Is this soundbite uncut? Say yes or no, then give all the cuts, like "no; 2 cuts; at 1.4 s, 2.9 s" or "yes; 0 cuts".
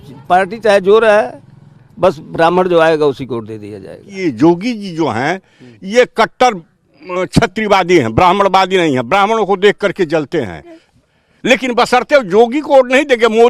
no; 2 cuts; at 4.1 s, 10.8 s